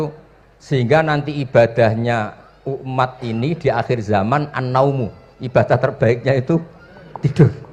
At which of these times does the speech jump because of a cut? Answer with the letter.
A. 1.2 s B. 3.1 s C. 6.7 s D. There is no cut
D